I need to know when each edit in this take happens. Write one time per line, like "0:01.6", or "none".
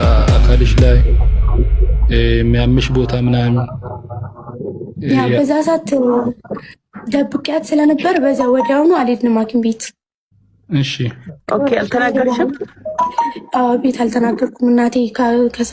none